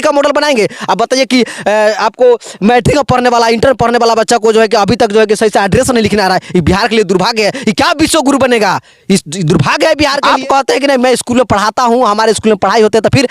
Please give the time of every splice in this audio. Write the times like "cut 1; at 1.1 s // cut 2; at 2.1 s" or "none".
cut 1; at 10.2 s